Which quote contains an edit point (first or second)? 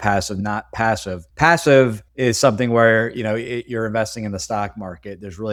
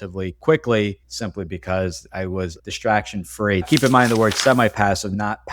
second